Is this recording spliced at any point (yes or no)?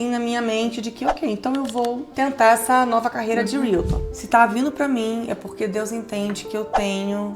yes